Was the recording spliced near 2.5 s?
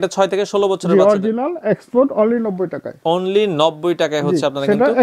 no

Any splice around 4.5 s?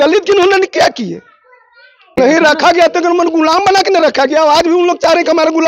no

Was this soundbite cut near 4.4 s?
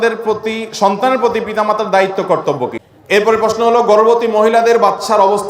no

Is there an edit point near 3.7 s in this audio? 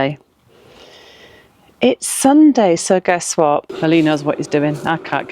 yes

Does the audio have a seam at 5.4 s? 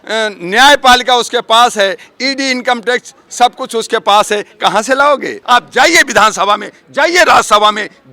yes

